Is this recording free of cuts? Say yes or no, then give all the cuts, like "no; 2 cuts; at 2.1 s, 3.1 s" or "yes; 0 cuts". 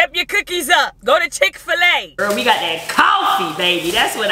no; 2 cuts; at 0.9 s, 2.1 s